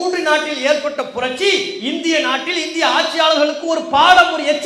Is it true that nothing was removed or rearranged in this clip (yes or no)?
yes